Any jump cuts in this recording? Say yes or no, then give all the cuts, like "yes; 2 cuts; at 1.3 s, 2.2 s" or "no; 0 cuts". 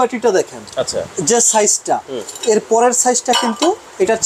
no; 0 cuts